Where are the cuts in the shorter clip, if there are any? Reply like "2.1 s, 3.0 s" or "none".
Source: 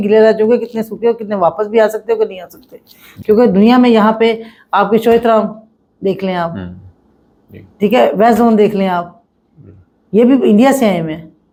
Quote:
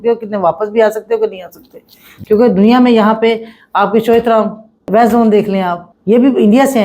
4.9 s, 5.9 s

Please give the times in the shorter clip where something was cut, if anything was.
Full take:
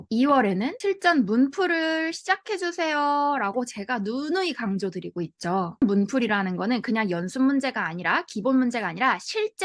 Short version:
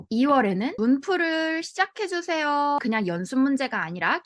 0.8 s, 2.8 s

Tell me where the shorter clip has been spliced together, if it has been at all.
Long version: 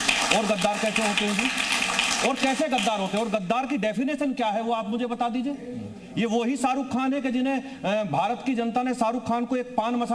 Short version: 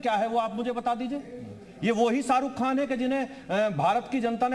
none

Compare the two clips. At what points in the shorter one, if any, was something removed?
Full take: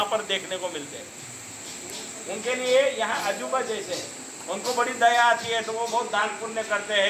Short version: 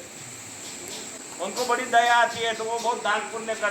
1.1 s

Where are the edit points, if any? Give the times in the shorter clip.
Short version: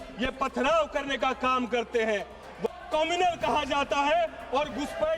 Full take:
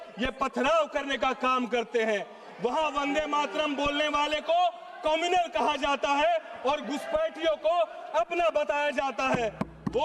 2.7 s

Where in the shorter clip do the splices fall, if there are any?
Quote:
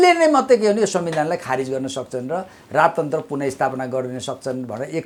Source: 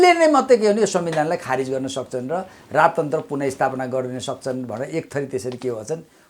none

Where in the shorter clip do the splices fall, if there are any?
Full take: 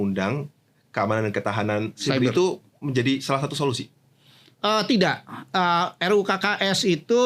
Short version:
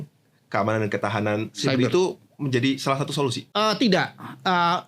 3.4 s

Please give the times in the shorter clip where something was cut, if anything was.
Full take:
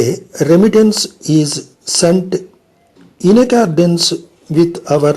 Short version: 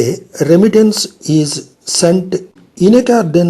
2.6 s

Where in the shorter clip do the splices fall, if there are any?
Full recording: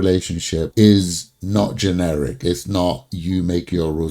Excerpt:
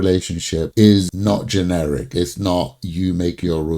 1.1 s

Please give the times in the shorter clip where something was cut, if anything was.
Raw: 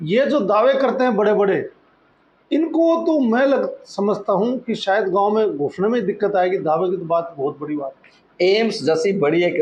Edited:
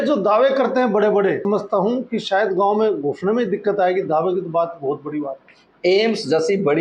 1.4 s

